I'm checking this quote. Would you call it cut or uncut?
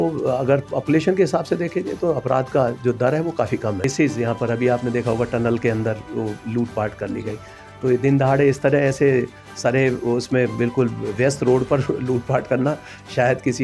cut